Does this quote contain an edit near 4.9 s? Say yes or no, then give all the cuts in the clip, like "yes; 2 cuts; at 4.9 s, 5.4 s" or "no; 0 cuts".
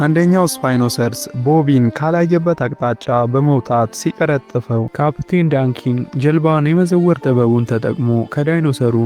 yes; 1 cut; at 4.9 s